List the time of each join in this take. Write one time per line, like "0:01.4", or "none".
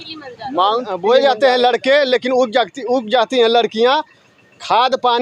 0:00.9